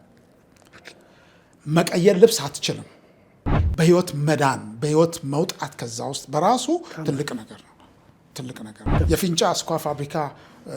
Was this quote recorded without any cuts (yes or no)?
no